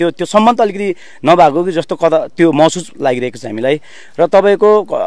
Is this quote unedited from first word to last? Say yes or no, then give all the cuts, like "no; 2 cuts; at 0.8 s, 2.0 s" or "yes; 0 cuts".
yes; 0 cuts